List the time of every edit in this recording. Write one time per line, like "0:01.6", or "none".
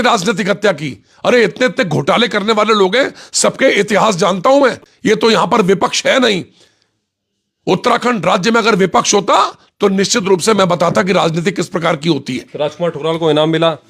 none

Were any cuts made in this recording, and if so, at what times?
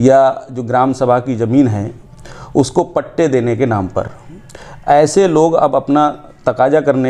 none

